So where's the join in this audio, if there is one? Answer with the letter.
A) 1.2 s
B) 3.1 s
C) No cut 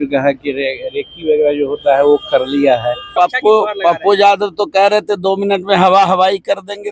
B